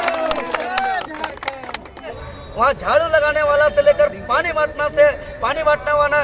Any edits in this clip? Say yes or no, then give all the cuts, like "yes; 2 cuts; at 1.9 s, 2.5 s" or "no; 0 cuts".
yes; 1 cut; at 2.2 s